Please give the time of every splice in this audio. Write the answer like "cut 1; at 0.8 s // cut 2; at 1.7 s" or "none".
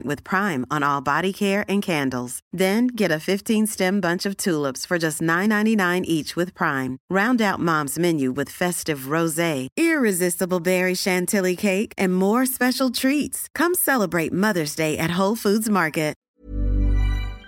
cut 1; at 16.2 s